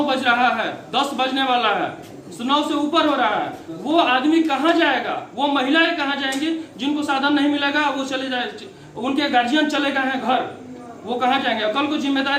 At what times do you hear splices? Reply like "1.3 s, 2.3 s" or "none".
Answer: none